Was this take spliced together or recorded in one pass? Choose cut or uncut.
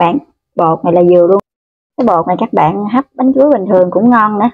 cut